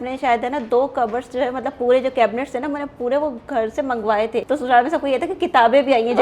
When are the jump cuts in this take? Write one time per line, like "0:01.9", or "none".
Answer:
0:04.4